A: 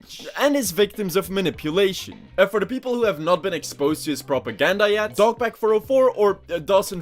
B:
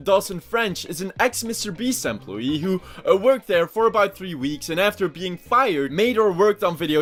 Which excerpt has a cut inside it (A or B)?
A